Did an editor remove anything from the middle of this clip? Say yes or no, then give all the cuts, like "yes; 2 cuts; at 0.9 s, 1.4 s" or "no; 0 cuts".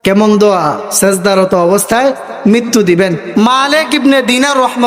yes; 1 cut; at 3.2 s